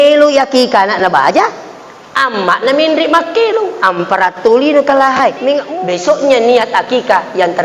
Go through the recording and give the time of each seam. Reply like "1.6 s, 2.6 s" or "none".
5.7 s

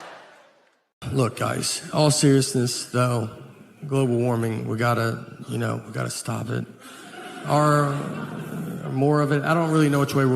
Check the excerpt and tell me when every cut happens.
1.0 s

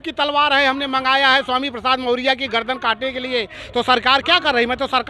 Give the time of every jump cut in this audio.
none

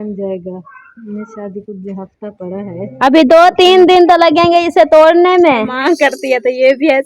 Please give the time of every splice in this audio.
5.7 s

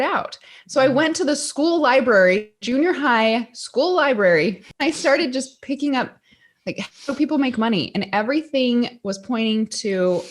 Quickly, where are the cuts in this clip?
4.7 s

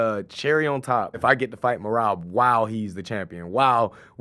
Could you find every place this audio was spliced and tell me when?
1.2 s

